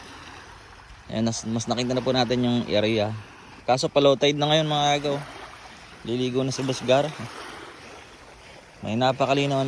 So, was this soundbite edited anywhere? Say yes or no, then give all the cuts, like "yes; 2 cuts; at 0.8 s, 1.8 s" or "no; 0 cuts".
yes; 1 cut; at 3.6 s